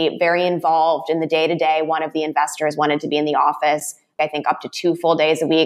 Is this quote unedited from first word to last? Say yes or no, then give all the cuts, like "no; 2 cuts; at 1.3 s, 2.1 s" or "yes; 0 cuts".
no; 1 cut; at 4.2 s